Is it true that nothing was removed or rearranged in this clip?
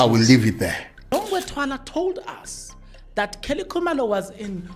no; 1 cut; at 1.1 s

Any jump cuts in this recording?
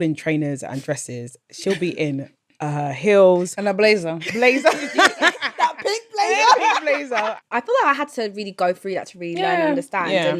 yes; 1 cut; at 7.4 s

